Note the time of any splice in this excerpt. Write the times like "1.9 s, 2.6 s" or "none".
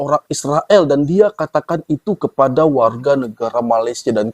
none

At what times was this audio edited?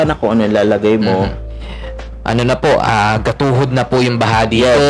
1.4 s

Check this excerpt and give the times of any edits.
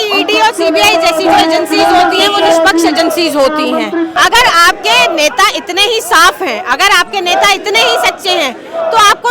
4.2 s

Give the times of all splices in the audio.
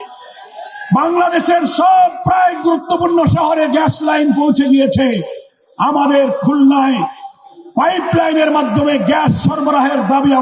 none

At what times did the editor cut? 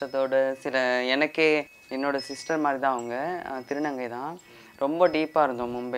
1.8 s

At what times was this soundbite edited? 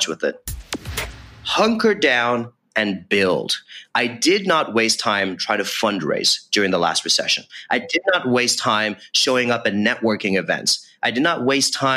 1.0 s

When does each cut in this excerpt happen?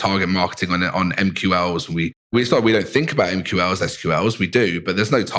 2.3 s

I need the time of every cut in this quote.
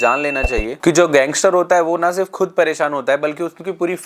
none

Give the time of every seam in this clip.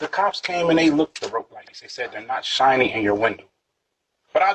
3.5 s

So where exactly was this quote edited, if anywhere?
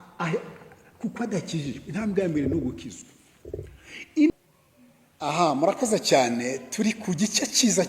4.3 s

